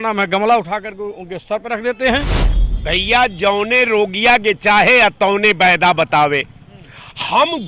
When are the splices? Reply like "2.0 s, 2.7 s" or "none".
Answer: 2.4 s